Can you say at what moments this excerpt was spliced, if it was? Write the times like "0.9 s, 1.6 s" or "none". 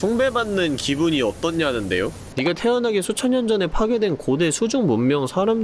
2.2 s